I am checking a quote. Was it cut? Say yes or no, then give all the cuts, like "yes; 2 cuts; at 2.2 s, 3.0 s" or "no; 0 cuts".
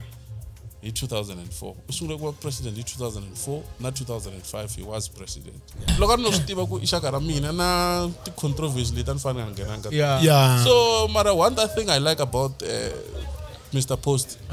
yes; 1 cut; at 5.8 s